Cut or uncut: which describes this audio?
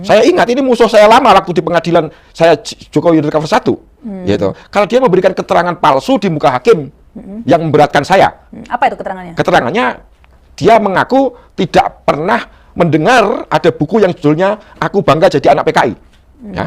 uncut